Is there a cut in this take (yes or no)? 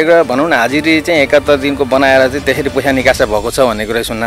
no